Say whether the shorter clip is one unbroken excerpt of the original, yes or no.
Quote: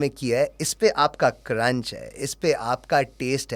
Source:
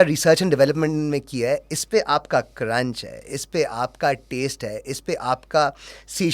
yes